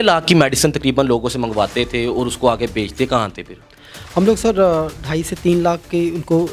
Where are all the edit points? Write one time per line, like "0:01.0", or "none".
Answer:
none